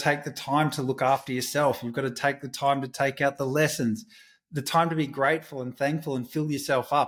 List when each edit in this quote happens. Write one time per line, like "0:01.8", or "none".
none

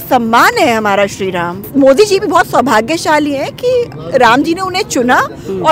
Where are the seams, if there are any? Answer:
0:01.5

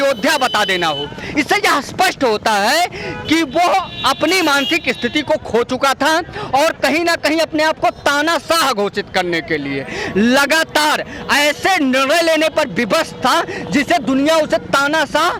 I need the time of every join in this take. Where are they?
none

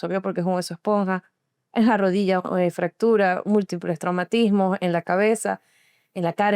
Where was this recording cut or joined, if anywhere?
none

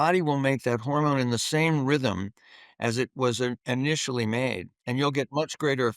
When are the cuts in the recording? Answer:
0:04.7

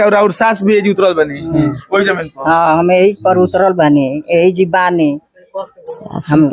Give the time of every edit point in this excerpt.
none

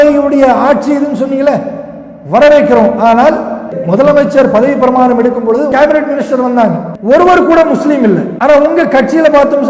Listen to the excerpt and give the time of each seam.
0:03.8
0:05.7
0:06.9
0:08.3

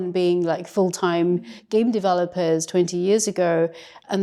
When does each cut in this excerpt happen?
none

